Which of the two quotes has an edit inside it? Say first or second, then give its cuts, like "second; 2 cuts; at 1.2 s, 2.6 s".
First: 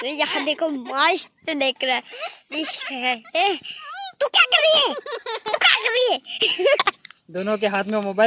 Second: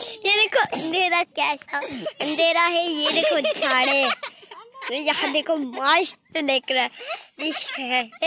first; 1 cut; at 6.8 s